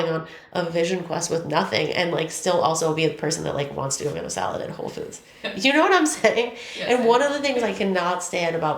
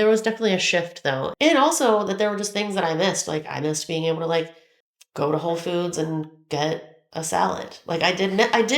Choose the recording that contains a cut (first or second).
second